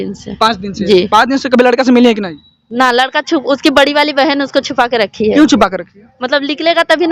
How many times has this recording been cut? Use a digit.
0